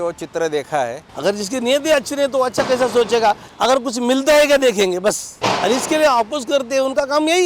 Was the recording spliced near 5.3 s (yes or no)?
yes